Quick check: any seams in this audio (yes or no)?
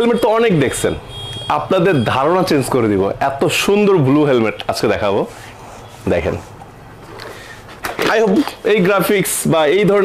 no